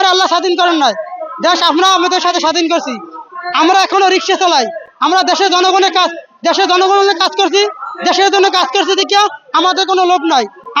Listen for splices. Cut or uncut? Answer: uncut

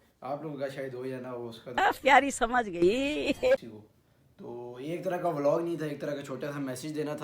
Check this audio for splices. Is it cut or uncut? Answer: cut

